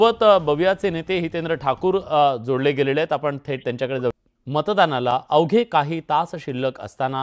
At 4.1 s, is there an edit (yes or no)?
yes